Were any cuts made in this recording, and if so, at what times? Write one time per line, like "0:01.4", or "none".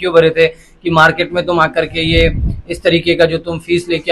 none